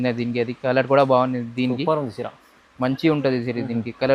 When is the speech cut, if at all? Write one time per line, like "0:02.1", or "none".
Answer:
none